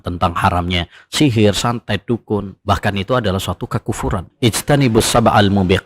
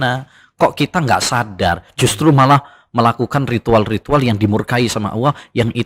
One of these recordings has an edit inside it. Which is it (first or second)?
first